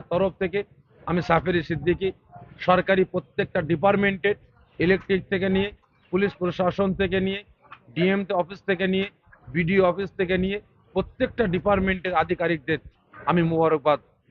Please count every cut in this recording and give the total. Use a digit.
0